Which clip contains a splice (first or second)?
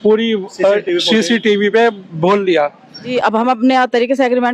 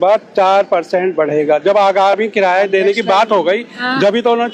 first